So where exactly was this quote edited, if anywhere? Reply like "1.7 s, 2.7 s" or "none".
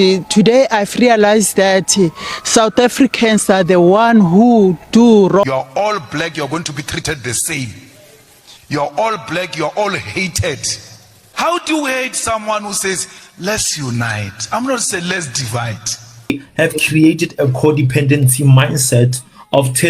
5.5 s, 16.3 s